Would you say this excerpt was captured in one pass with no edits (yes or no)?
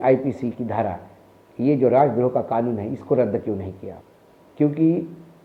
yes